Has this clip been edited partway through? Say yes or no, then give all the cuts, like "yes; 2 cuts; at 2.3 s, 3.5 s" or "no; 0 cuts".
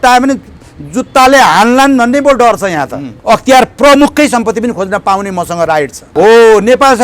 yes; 2 cuts; at 3.1 s, 6.0 s